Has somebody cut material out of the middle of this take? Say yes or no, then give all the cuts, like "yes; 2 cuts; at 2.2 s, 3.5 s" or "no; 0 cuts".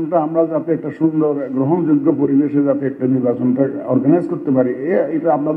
no; 0 cuts